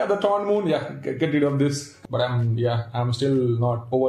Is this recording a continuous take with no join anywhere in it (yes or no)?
no